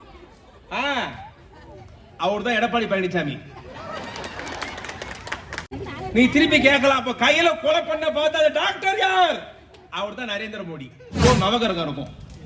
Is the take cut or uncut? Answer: cut